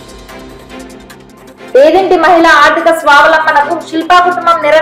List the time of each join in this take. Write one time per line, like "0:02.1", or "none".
none